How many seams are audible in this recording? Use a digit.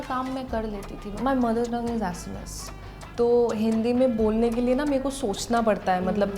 1